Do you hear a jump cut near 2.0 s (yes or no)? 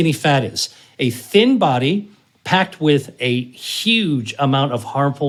no